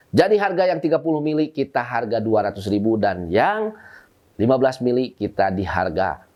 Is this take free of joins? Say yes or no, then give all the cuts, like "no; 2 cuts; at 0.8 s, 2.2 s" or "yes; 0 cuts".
yes; 0 cuts